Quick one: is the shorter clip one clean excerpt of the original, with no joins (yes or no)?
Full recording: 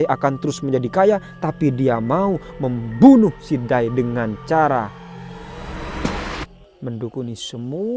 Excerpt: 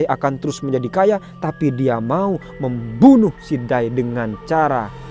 yes